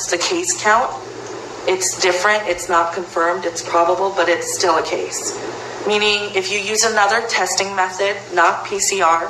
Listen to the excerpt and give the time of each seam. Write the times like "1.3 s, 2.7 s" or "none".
none